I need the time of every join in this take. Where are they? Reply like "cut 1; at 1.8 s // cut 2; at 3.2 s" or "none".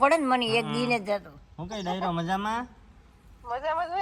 none

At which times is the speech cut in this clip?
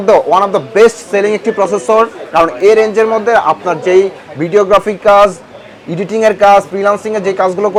none

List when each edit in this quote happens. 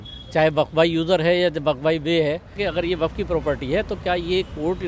cut 1; at 2.6 s

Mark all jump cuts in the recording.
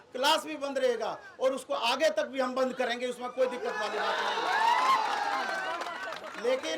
none

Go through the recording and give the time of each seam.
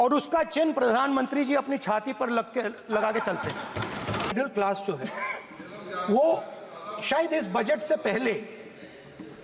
cut 1; at 4.3 s

